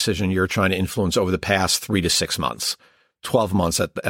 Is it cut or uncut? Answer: uncut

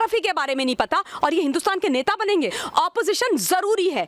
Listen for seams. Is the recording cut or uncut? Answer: cut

